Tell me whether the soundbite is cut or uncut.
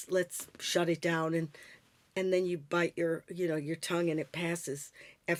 uncut